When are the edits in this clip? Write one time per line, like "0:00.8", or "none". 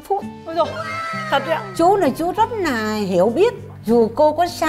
0:01.7
0:03.7